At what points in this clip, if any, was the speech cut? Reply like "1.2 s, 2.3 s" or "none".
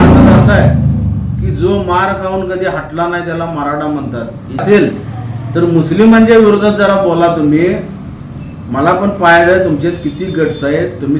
4.6 s